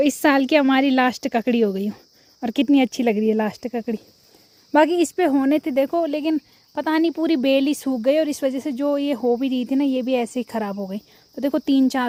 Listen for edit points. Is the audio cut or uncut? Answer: uncut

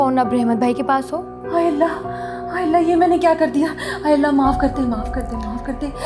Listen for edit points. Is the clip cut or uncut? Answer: uncut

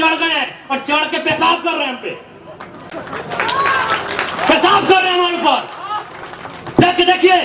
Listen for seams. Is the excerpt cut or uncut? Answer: uncut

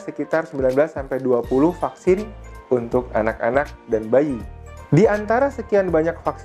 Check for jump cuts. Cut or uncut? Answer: uncut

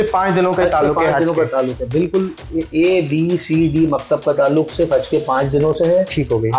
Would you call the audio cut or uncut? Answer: uncut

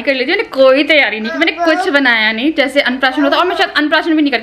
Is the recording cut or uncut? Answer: uncut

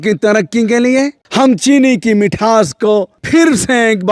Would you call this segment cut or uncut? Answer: cut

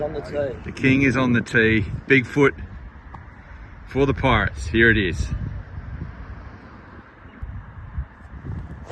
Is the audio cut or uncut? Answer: cut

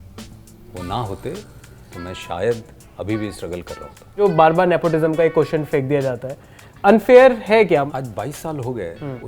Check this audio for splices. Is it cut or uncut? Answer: cut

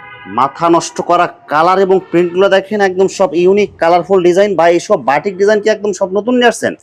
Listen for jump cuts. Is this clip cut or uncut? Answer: uncut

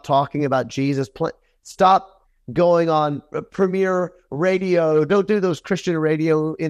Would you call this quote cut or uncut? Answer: uncut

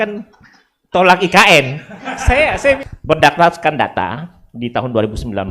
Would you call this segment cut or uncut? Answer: cut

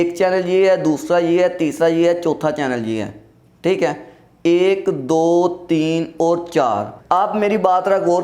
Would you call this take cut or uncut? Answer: cut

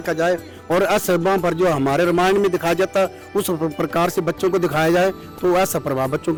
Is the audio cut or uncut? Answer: uncut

